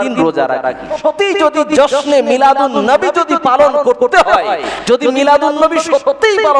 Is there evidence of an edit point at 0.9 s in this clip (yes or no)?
yes